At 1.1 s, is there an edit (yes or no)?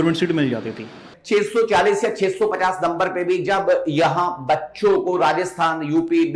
yes